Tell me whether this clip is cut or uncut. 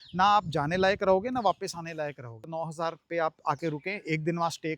cut